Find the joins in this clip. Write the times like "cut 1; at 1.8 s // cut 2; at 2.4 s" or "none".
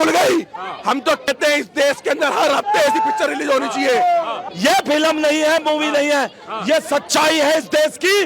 cut 1; at 1.3 s // cut 2; at 4.4 s